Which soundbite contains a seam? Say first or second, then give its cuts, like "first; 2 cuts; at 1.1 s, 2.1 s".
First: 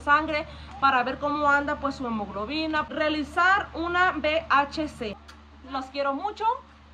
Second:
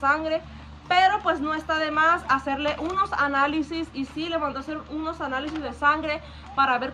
first; 2 cuts; at 2.9 s, 5.2 s